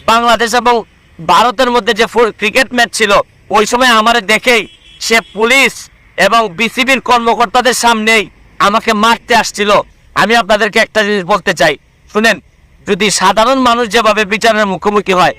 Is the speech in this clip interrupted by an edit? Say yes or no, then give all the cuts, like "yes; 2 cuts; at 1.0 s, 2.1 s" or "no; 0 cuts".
yes; 1 cut; at 10.0 s